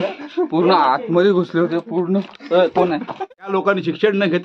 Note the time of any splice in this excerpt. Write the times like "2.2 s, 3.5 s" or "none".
3.3 s